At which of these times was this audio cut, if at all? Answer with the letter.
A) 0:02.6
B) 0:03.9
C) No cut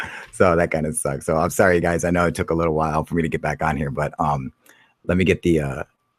C